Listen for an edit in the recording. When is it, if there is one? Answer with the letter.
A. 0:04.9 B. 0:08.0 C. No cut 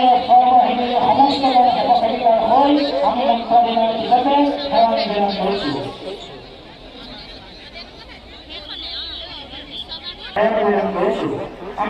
C